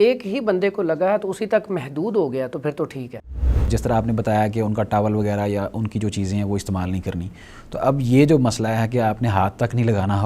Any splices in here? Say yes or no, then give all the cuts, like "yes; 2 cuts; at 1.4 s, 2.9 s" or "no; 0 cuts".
yes; 1 cut; at 3.7 s